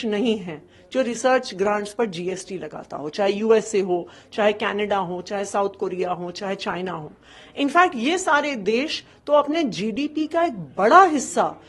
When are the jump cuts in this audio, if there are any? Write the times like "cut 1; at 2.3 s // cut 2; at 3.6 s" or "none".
none